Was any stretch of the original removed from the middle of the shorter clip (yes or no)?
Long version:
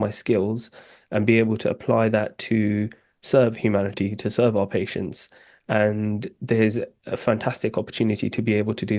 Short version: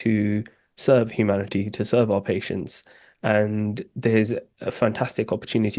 no